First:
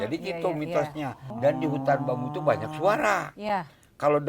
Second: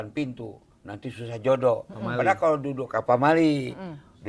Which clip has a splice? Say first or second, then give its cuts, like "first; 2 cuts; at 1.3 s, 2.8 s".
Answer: first; 1 cut; at 1.3 s